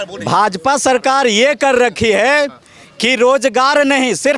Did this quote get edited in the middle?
no; 0 cuts

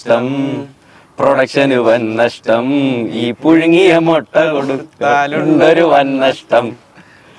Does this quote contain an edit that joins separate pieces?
no; 0 cuts

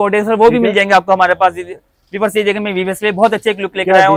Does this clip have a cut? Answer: no; 0 cuts

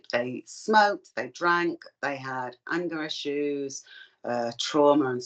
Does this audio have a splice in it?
no; 0 cuts

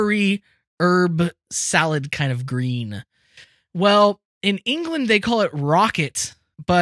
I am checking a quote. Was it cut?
yes; 1 cut; at 4.3 s

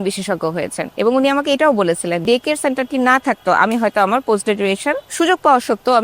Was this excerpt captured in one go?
no; 2 cuts; at 2.2 s, 5.1 s

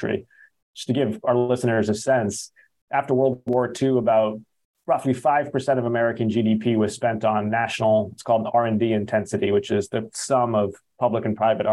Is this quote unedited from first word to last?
yes; 0 cuts

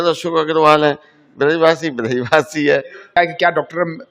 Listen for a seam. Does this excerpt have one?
yes; 1 cut; at 3.2 s

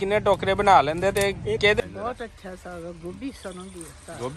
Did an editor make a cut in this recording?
yes; 1 cut; at 1.8 s

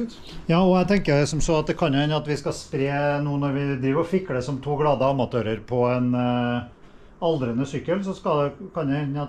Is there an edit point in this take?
no; 0 cuts

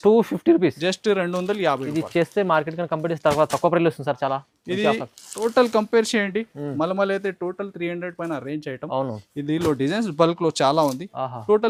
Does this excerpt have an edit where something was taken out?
no; 0 cuts

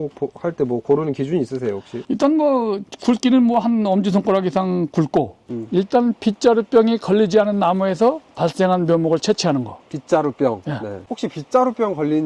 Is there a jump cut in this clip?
yes; 2 cuts; at 5.5 s, 11.0 s

